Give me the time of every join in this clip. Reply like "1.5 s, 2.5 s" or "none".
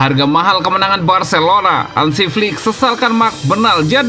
none